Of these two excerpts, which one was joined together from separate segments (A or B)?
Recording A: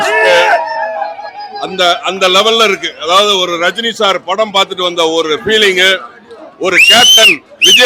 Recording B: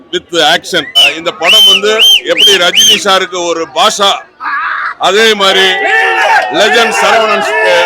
B